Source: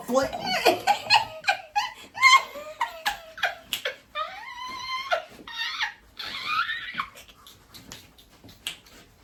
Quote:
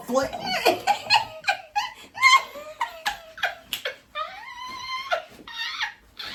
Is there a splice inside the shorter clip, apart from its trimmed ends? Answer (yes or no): no